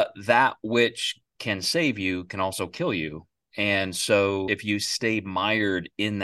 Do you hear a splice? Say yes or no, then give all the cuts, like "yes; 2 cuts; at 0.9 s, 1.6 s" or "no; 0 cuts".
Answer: yes; 1 cut; at 4.5 s